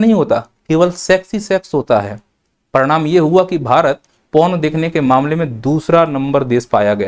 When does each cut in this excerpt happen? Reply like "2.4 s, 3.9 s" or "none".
none